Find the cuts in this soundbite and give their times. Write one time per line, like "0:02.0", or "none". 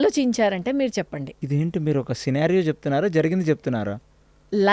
0:01.3